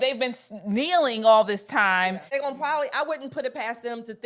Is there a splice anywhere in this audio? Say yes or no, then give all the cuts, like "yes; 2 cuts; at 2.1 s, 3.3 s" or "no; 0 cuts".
yes; 1 cut; at 2.4 s